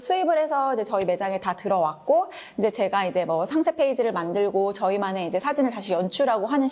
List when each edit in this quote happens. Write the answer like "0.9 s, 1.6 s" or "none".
none